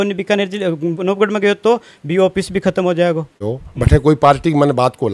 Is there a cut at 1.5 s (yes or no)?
no